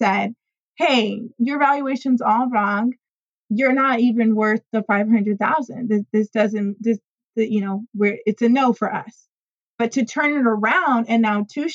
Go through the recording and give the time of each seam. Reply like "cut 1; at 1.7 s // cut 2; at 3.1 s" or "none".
cut 1; at 3.3 s